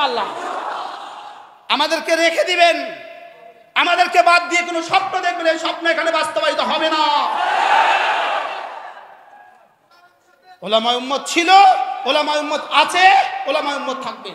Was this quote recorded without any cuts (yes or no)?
yes